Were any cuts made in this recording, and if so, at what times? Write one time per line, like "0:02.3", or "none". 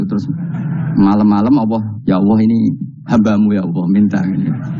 0:01.9